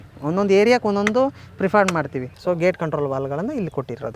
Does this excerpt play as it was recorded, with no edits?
no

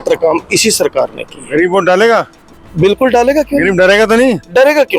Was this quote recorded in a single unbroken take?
yes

